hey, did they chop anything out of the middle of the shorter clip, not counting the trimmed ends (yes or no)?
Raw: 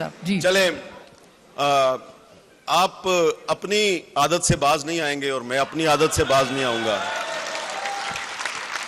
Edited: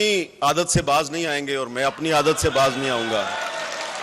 no